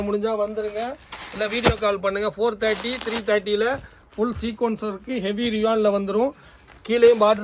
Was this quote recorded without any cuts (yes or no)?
yes